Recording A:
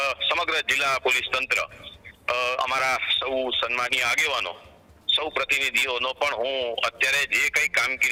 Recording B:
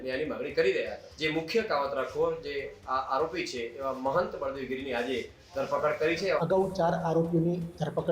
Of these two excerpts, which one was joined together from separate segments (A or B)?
B